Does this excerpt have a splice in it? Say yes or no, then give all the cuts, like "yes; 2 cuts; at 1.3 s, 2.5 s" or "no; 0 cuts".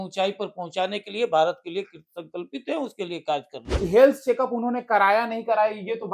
yes; 1 cut; at 3.6 s